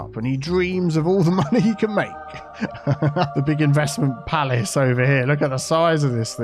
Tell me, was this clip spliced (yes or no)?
yes